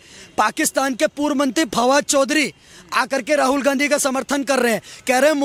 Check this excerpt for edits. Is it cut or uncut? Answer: uncut